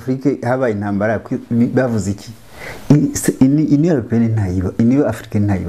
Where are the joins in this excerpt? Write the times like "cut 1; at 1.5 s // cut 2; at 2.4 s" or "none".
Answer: none